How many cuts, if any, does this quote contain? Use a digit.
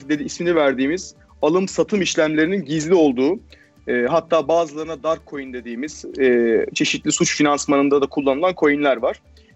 0